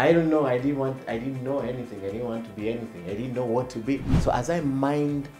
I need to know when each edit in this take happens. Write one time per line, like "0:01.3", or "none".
0:04.1